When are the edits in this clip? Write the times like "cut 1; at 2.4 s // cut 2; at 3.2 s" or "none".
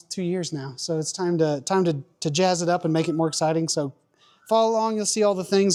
none